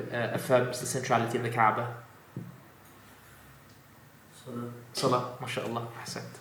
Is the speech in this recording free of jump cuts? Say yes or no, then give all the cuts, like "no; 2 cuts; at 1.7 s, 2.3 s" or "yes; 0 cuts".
yes; 0 cuts